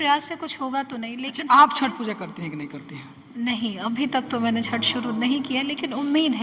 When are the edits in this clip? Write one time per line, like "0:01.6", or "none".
0:01.3